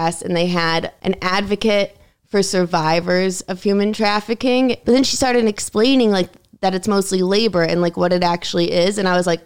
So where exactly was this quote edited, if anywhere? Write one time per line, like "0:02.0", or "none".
0:00.9
0:04.8